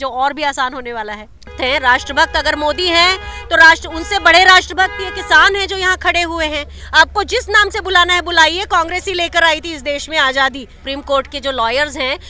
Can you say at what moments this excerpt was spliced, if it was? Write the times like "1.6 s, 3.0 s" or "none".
1.5 s, 6.7 s, 10.9 s